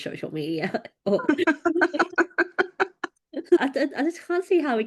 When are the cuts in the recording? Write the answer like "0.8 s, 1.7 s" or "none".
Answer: 3.6 s